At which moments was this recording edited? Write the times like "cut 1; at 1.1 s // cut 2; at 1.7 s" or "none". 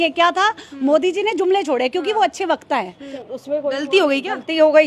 cut 1; at 3.1 s